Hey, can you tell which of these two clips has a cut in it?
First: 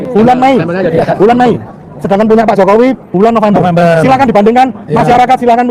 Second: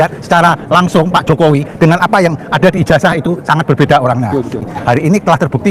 second; 1 cut; at 4.6 s

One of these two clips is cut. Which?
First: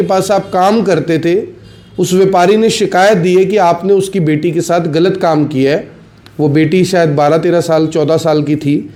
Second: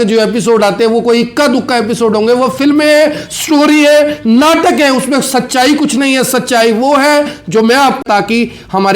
second; 1 cut; at 8.0 s

